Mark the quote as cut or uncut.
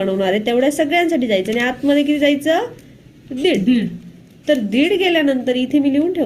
uncut